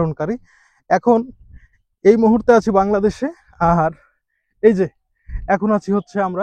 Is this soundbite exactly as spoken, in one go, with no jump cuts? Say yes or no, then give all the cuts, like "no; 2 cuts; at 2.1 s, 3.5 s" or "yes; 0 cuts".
yes; 0 cuts